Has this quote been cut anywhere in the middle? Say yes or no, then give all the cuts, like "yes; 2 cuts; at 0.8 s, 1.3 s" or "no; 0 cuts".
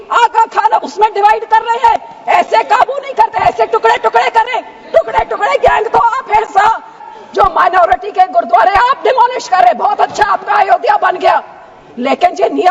yes; 1 cut; at 7.0 s